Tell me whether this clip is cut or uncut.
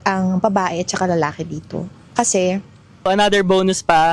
cut